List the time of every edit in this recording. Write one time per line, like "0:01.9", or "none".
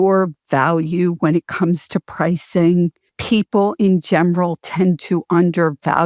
0:03.1